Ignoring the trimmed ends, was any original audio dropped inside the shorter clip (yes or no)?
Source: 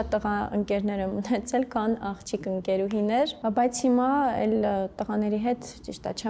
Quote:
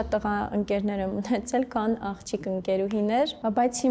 no